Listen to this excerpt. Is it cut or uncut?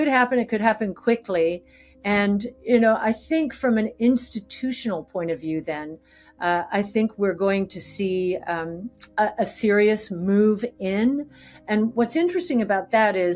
uncut